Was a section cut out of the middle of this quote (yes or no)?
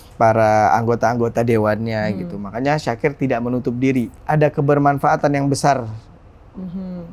yes